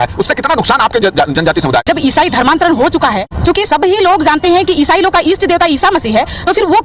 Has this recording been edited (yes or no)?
yes